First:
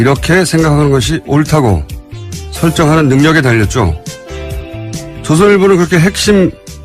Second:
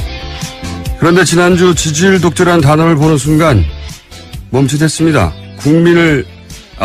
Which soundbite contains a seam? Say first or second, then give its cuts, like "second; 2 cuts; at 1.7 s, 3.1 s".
second; 1 cut; at 5.6 s